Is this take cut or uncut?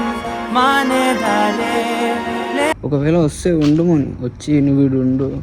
cut